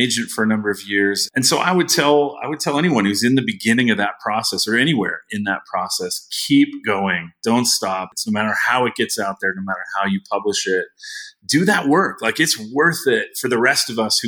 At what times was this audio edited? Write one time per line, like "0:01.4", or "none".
0:01.2
0:08.1